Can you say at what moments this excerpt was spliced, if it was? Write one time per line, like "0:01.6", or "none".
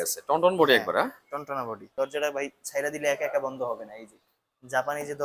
0:01.9